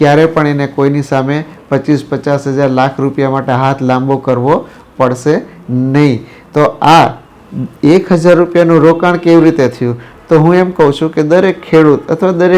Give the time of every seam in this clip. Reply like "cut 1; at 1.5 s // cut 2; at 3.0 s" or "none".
none

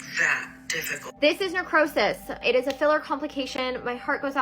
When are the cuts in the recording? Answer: cut 1; at 1.0 s // cut 2; at 2.4 s

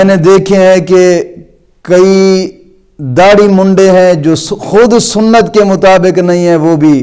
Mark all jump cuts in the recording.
none

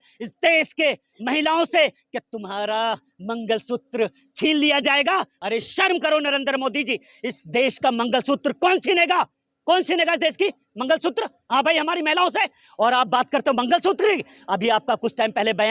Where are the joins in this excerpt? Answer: none

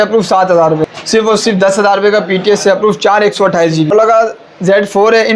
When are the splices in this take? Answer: cut 1; at 0.8 s // cut 2; at 3.9 s

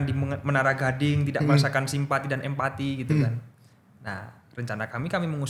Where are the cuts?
none

